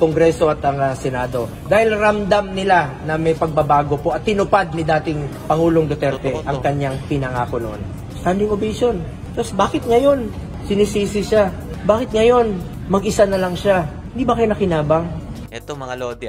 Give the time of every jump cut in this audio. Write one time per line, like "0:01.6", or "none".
none